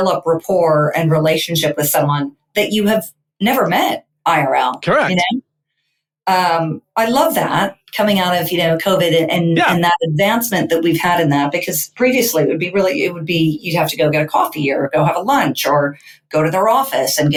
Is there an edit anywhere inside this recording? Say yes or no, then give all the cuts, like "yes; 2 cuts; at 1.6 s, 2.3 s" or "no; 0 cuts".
no; 0 cuts